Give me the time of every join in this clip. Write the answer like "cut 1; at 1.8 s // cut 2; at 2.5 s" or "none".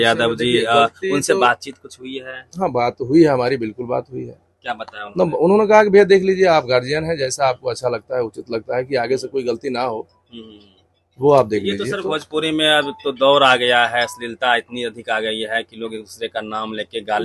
none